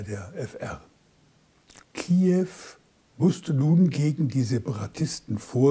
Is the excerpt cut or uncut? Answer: cut